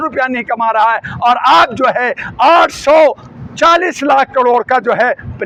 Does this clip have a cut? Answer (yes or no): no